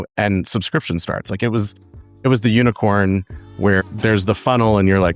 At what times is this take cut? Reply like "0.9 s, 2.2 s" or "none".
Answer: 3.9 s